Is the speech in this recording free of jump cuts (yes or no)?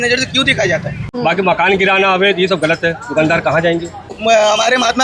no